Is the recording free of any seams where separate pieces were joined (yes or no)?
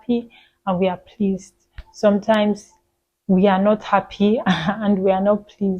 yes